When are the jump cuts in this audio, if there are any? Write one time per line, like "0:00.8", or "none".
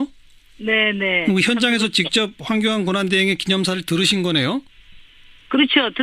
0:04.2